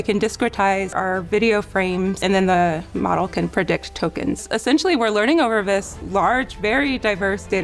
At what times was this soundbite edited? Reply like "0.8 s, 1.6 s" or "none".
0.9 s, 2.2 s, 4.4 s